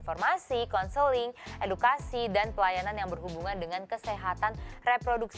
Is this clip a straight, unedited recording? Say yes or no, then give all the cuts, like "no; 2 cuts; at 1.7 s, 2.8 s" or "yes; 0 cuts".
yes; 0 cuts